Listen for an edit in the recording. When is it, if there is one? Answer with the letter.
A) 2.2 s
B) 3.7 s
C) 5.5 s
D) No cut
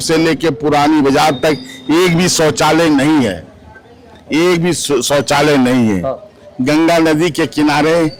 D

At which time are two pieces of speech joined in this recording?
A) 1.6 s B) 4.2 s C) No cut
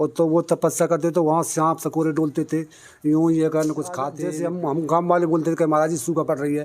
B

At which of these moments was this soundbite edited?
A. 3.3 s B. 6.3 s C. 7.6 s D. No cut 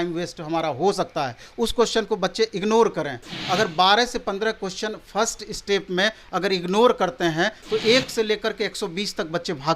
C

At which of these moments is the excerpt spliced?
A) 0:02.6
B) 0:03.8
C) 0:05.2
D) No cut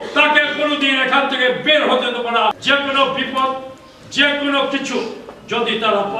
A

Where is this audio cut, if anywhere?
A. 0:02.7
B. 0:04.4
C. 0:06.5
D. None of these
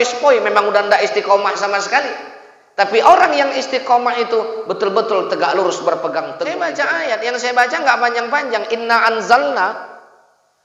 C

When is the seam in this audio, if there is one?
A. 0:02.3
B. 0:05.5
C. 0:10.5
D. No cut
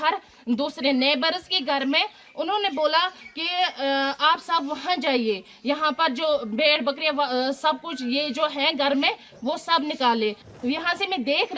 C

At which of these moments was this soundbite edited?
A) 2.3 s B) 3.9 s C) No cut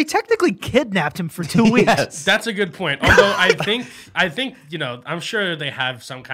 C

